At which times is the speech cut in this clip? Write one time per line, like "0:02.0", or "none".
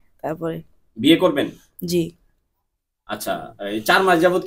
none